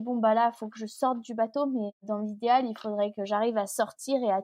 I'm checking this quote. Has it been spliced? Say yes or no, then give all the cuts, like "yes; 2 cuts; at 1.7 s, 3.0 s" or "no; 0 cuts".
yes; 1 cut; at 2.0 s